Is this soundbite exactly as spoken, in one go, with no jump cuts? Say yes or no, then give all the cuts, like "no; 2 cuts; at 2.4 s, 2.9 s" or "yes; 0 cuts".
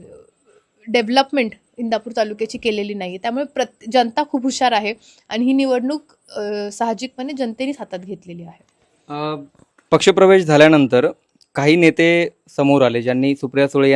yes; 0 cuts